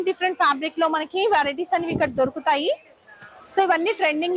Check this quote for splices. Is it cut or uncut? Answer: uncut